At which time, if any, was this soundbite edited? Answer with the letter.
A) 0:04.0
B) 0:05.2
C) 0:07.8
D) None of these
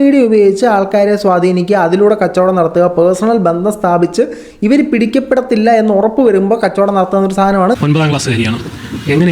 C